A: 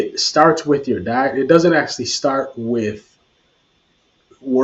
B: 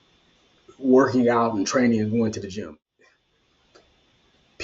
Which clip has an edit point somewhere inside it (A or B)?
B